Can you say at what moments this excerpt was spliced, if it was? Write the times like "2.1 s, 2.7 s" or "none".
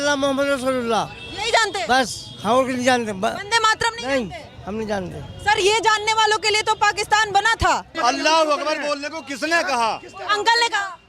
7.9 s